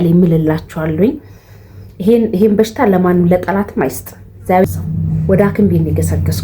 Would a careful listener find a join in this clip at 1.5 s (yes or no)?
no